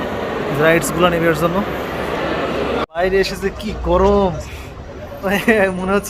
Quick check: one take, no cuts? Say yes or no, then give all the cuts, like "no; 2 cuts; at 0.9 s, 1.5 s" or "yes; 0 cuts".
no; 1 cut; at 3.0 s